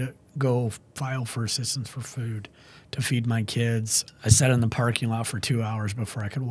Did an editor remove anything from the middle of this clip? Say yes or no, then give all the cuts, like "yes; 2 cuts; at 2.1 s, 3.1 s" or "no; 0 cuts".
yes; 1 cut; at 4.0 s